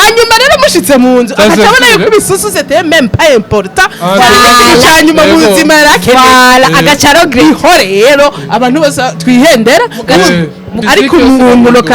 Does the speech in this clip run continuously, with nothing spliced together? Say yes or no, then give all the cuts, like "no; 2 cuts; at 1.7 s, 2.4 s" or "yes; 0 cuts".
no; 1 cut; at 10.7 s